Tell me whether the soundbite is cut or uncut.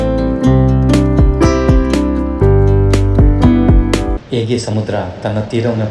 cut